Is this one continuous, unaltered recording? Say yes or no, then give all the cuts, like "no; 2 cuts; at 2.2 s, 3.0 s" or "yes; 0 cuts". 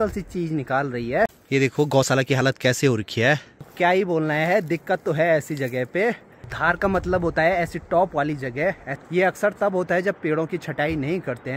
no; 4 cuts; at 1.4 s, 3.7 s, 6.6 s, 8.9 s